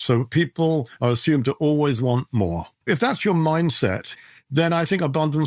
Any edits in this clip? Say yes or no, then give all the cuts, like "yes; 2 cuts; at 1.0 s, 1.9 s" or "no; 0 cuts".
yes; 2 cuts; at 2.7 s, 4.1 s